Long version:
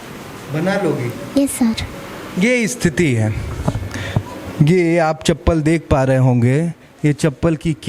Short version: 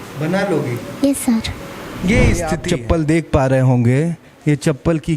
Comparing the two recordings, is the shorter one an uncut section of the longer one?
no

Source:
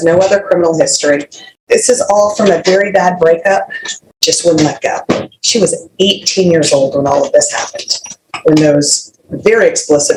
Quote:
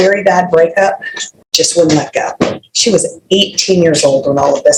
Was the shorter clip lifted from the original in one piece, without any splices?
yes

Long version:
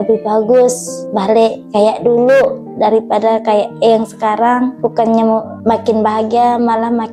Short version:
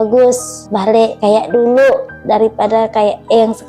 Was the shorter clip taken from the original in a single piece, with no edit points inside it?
no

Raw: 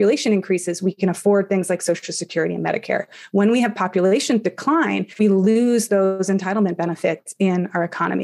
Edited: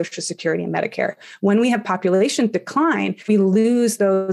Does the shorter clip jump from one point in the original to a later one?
no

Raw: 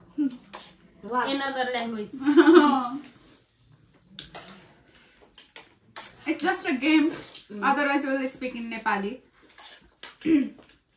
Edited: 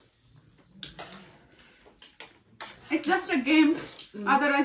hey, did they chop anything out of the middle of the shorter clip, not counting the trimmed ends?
no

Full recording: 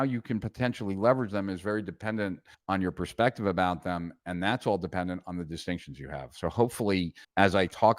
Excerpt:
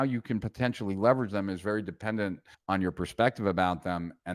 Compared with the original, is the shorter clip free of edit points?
yes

